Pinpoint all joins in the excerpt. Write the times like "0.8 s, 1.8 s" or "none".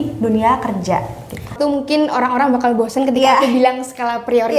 1.5 s